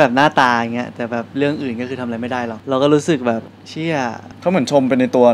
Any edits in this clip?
yes; 1 cut; at 2.6 s

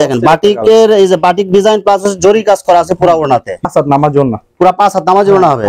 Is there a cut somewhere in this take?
yes; 1 cut; at 3.6 s

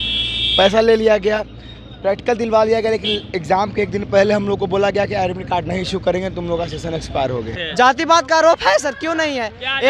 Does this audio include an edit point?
yes; 1 cut; at 7.6 s

